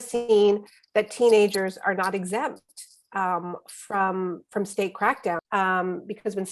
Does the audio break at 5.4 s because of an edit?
yes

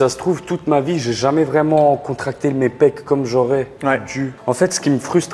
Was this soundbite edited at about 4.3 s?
yes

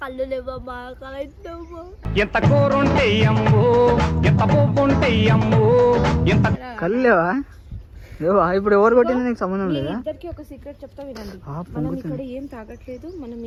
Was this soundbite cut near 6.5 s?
no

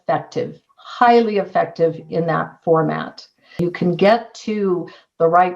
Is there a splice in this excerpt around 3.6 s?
yes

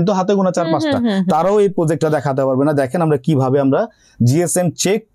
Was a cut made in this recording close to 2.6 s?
no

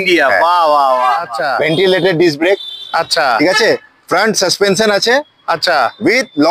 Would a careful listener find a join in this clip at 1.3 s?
yes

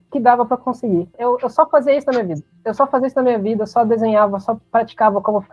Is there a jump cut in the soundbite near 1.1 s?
yes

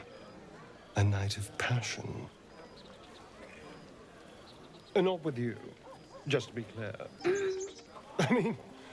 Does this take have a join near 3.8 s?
no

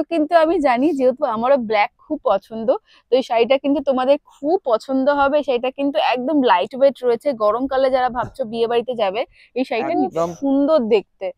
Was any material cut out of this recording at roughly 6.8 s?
no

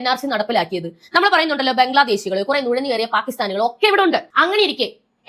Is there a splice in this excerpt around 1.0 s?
no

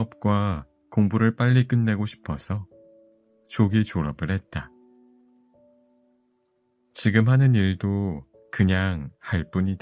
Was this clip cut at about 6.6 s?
yes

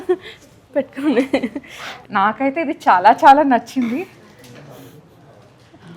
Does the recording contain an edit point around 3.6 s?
no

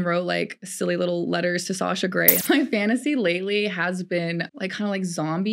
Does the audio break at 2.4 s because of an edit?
yes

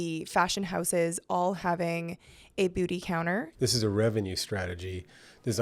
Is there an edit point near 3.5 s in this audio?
yes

